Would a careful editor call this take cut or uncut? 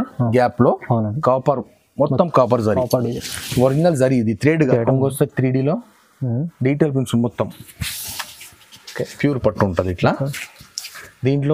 cut